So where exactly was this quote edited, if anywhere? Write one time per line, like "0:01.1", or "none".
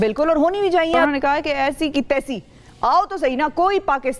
0:01.1